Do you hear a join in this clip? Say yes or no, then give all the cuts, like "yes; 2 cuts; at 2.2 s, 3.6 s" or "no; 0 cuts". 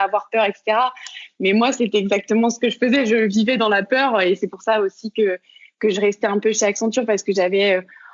no; 0 cuts